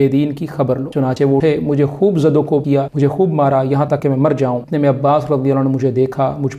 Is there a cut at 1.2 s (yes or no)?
yes